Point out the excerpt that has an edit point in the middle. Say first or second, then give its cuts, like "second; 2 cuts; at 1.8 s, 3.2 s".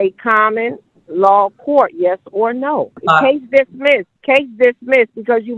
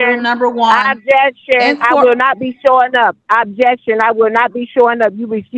first; 2 cuts; at 3.0 s, 4.1 s